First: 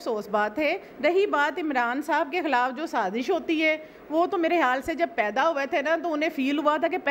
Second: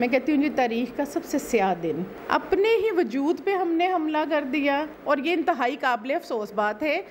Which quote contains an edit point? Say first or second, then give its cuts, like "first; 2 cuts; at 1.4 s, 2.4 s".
second; 2 cuts; at 2.1 s, 4.9 s